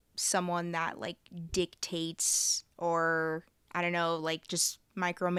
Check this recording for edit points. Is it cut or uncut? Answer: uncut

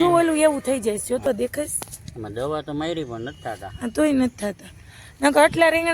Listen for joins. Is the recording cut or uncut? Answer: cut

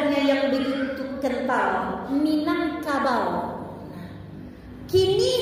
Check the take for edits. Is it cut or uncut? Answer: uncut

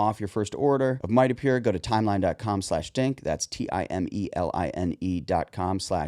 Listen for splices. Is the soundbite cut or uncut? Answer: cut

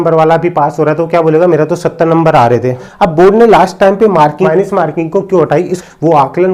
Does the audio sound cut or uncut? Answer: cut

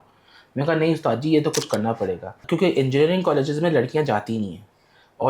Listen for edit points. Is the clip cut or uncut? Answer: cut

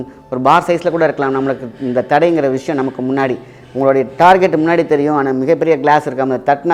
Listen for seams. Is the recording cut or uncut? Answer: uncut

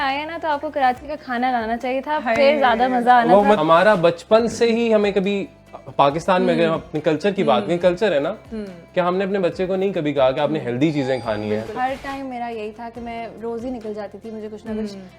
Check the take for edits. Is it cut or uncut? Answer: cut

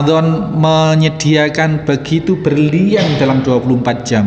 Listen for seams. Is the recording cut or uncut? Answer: uncut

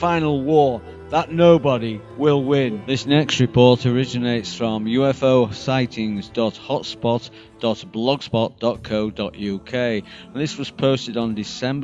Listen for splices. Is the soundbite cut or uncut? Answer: uncut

